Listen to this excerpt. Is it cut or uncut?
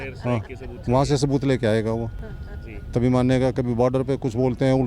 uncut